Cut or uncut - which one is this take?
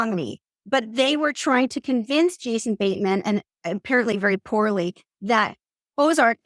uncut